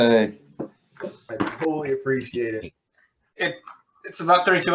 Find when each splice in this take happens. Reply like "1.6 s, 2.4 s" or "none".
3.4 s